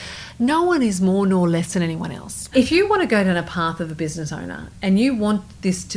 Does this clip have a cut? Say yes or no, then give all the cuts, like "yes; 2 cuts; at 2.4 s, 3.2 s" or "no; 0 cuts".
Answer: yes; 1 cut; at 2.5 s